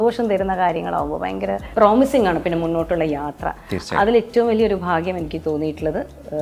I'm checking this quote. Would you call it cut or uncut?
cut